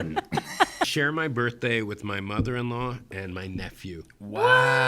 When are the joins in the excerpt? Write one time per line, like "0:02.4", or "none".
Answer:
0:00.9